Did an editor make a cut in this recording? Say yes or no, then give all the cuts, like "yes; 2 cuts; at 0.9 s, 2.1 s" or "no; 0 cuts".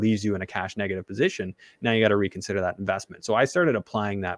no; 0 cuts